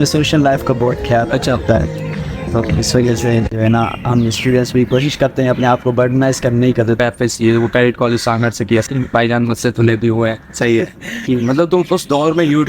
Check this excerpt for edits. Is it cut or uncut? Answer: cut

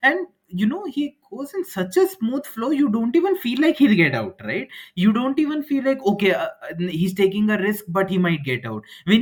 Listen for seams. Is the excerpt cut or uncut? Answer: uncut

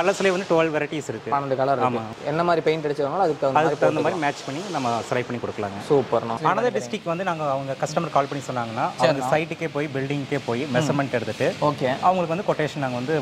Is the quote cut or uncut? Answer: cut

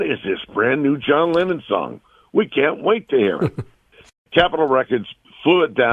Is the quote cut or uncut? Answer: cut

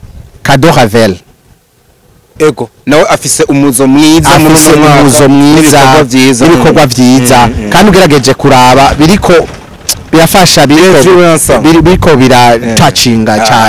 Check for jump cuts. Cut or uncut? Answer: uncut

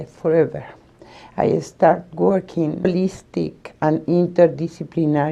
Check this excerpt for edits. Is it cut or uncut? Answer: uncut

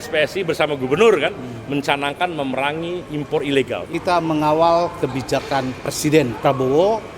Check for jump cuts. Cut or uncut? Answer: cut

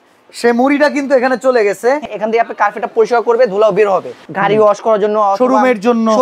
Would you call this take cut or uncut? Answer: cut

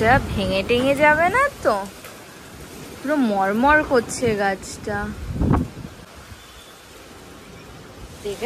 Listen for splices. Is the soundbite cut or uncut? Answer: uncut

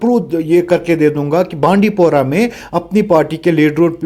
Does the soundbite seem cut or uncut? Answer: uncut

